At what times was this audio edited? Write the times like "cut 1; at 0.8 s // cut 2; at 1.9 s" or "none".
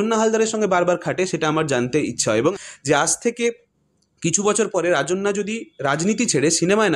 cut 1; at 2.5 s